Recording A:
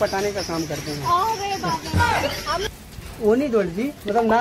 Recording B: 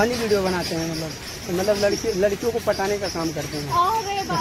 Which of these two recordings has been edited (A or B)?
A